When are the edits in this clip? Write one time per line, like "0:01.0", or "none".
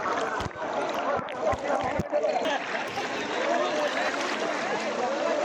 none